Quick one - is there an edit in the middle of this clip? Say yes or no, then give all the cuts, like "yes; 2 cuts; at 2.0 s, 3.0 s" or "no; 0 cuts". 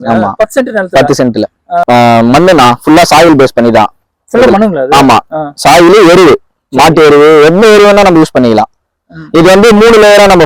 yes; 1 cut; at 1.8 s